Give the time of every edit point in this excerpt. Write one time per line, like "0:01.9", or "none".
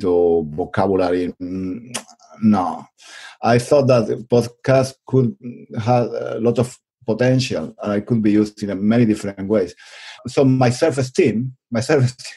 0:10.1